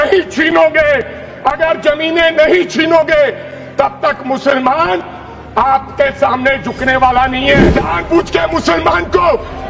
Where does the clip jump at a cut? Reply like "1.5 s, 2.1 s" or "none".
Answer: 7.7 s